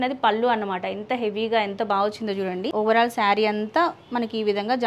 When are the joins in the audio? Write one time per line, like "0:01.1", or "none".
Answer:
0:02.7